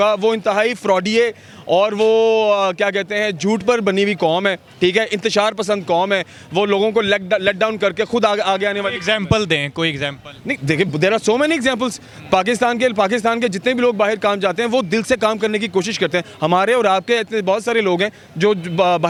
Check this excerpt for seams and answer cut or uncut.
uncut